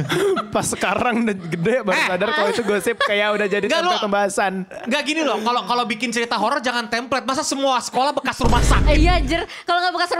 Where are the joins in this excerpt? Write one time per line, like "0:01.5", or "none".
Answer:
none

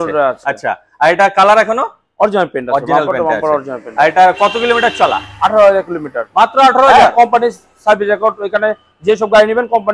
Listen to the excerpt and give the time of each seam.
none

